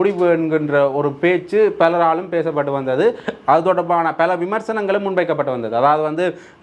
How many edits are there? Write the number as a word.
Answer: zero